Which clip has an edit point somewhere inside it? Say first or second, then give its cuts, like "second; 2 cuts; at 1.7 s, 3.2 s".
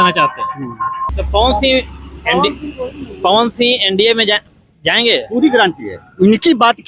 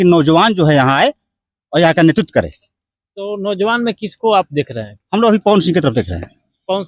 first; 1 cut; at 1.1 s